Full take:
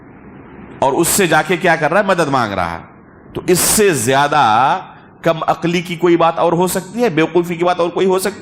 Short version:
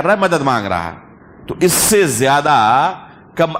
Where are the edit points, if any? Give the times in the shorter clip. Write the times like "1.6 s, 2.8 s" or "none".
none